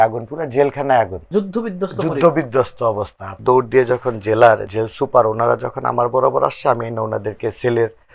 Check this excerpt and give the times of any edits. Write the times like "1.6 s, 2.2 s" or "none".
1.3 s, 3.3 s, 4.7 s